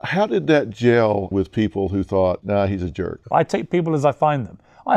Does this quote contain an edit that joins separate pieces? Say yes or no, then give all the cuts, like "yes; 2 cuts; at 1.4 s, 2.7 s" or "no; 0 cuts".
yes; 2 cuts; at 1.3 s, 2.9 s